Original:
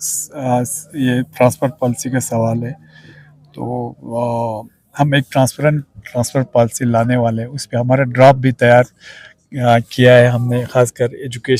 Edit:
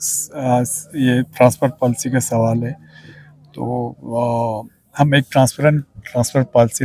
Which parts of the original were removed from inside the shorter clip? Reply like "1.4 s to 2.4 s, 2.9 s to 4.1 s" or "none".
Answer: none